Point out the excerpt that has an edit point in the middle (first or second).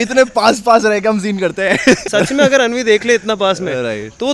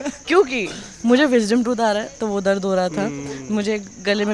first